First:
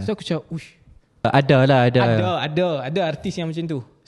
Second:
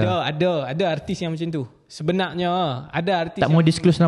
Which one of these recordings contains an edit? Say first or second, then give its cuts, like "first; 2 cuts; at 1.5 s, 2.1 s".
first; 1 cut; at 1.2 s